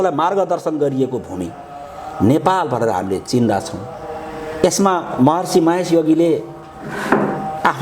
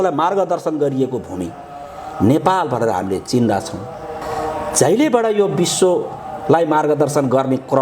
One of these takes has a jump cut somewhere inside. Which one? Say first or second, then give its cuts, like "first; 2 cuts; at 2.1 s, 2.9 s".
second; 1 cut; at 4.2 s